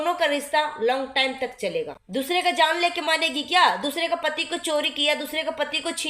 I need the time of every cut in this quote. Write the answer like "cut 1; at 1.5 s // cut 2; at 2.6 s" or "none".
cut 1; at 2.0 s